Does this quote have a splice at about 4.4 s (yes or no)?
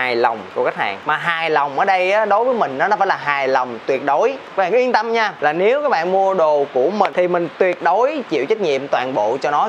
yes